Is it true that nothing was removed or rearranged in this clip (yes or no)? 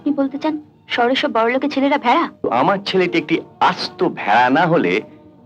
no